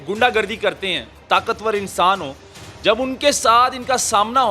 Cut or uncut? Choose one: cut